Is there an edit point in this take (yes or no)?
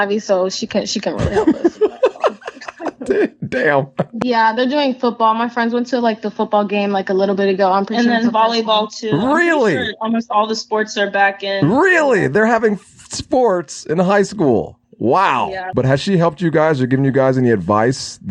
yes